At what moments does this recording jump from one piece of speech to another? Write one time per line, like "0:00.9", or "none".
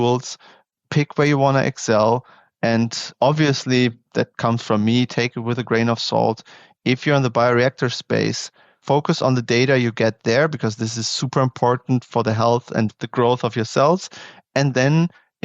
0:04.3

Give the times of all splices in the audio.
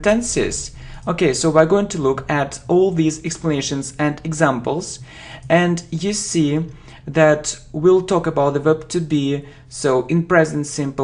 none

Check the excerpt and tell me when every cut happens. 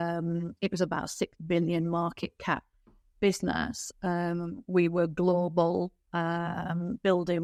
none

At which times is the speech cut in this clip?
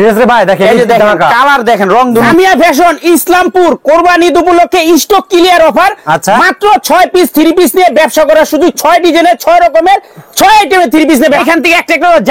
0:02.3
0:11.4

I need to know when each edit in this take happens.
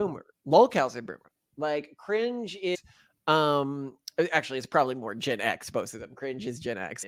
none

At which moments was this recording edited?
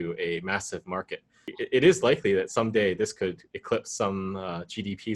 0:01.5

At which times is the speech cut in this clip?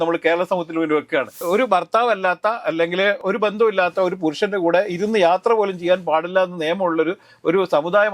0:01.4
0:03.2

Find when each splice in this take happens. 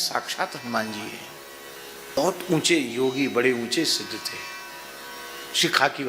0:02.2

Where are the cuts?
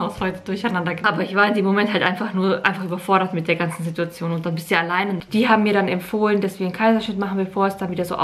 0:01.0
0:05.2

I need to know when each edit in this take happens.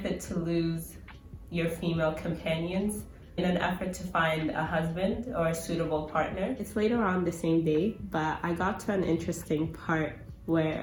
none

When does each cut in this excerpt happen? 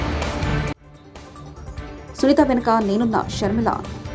0:01.4

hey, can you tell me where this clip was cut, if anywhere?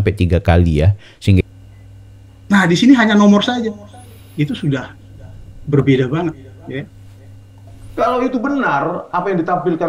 0:01.4
0:07.9

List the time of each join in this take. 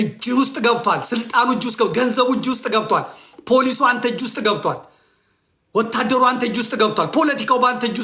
0:03.2

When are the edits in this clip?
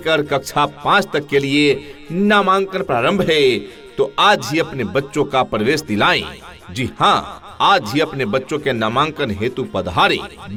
none

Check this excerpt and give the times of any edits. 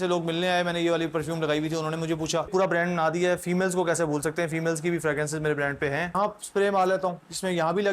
0:02.5
0:06.2

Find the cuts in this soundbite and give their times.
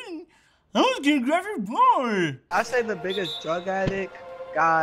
0:02.5

